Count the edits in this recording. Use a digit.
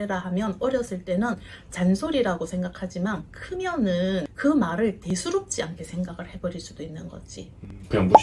0